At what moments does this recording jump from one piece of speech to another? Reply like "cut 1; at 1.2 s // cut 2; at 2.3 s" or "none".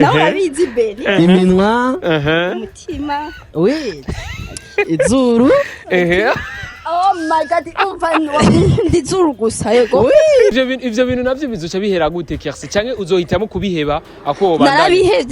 cut 1; at 10.5 s

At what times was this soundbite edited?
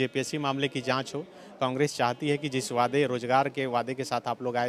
none

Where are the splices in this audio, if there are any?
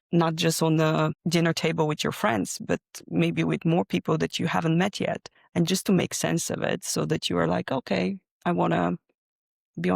none

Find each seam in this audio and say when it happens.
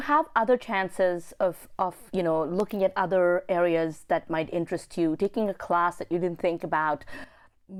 none

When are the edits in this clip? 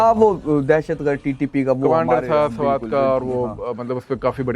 none

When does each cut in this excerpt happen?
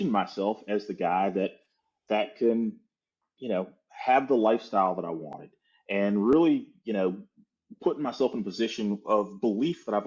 none

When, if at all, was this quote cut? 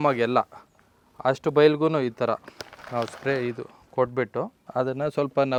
none

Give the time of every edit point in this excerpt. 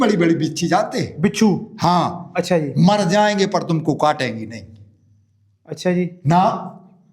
none

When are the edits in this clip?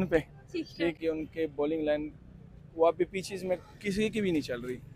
cut 1; at 1.0 s

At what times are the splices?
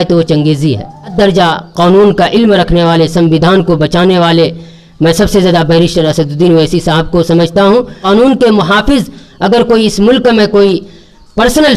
cut 1; at 1.1 s // cut 2; at 8.0 s

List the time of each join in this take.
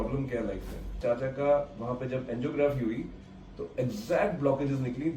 cut 1; at 1.0 s

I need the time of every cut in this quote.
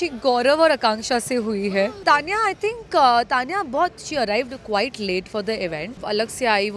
cut 1; at 2.0 s // cut 2; at 6.0 s

